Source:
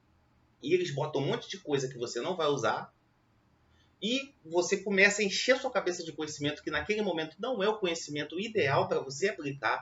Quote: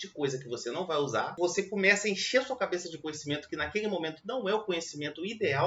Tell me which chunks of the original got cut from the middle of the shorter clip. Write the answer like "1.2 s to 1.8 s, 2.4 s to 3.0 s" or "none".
2.8 s to 4.5 s